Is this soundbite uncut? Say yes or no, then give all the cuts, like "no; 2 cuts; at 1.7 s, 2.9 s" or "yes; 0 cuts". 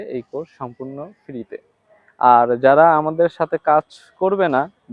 yes; 0 cuts